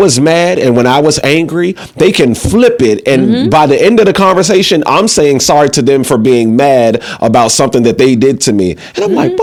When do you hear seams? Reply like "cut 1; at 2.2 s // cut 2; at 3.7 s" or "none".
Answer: none